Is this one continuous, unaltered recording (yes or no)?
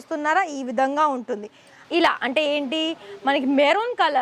no